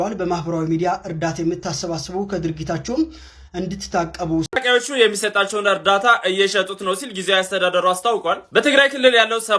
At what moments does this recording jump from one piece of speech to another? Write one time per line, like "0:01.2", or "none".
0:04.6